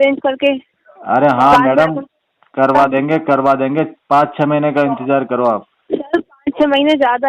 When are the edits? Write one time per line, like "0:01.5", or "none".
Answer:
none